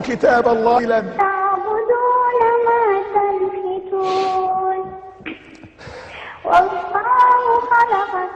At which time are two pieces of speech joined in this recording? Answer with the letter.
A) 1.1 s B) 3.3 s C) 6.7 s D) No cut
A